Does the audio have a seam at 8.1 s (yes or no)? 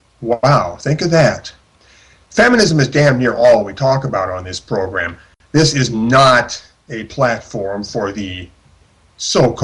yes